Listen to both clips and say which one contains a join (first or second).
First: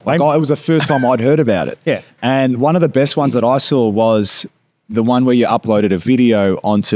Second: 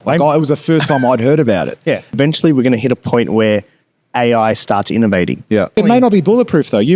second